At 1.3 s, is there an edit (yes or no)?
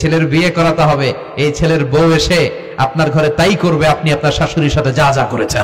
no